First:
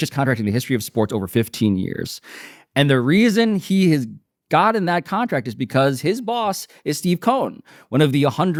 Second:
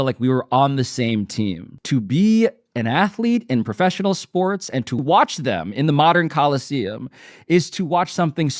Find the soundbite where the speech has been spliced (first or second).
second